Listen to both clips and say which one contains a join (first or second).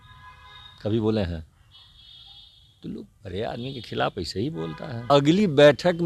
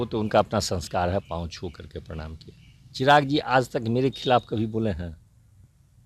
first